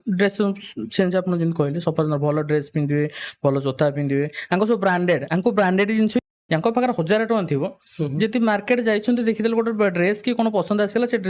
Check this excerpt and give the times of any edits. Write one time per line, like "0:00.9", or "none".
0:06.2

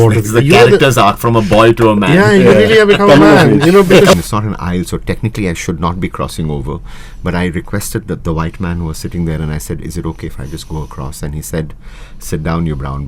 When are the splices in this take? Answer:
0:04.1

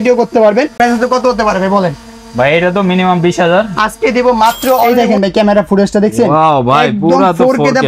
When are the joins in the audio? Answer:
0:00.8
0:04.9

